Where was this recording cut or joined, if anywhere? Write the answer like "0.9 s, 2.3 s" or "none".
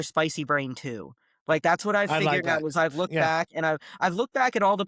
none

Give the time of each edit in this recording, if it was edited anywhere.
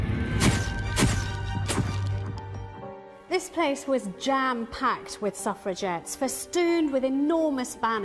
1.1 s

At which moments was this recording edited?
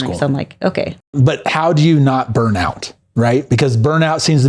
1.1 s

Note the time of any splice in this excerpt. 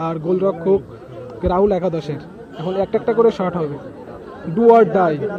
none

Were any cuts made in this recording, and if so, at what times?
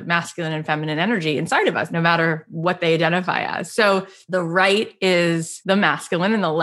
1.9 s, 4.2 s, 5.5 s

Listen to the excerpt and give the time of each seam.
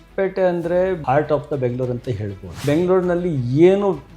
1.0 s, 2.6 s

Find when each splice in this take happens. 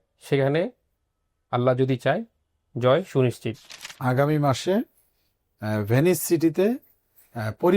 3.8 s

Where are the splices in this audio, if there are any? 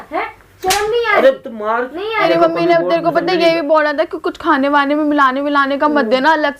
2.2 s

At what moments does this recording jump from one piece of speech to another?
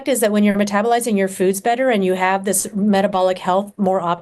none

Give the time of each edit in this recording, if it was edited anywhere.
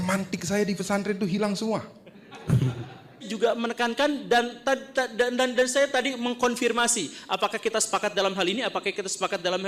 3.3 s

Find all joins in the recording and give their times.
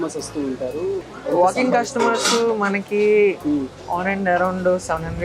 1.0 s

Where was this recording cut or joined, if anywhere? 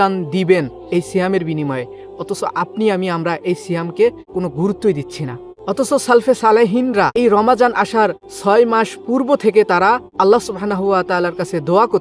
4.2 s, 5.5 s, 7.2 s, 8.3 s, 10.1 s

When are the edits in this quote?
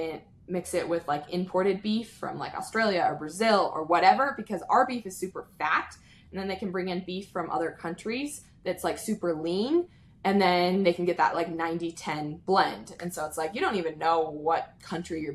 none

